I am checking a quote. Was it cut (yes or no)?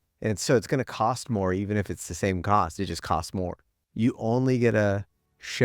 yes